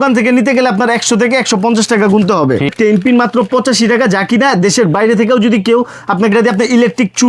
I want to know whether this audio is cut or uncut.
cut